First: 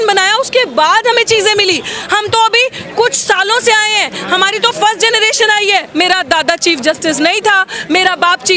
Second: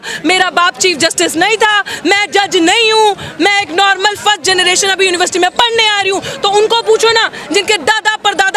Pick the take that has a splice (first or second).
first